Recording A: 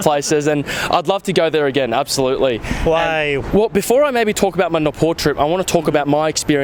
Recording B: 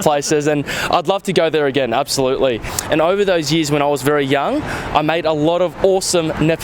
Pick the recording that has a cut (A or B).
B